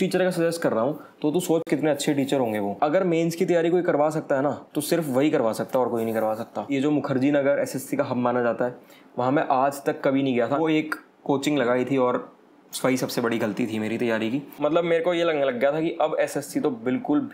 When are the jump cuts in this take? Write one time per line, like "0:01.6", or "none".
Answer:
0:02.7
0:06.7
0:10.6
0:14.5